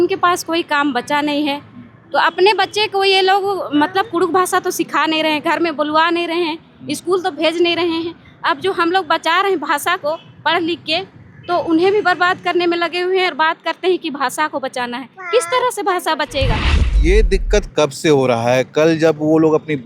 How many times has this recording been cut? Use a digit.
1